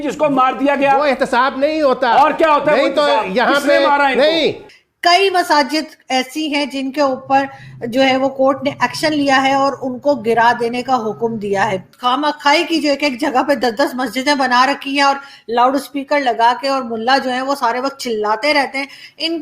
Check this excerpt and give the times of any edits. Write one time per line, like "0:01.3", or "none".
0:04.6
0:11.9